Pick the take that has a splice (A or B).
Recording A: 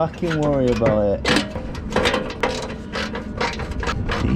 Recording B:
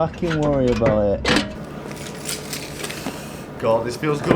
B